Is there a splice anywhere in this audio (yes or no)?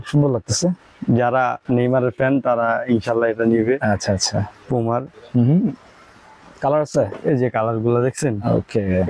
no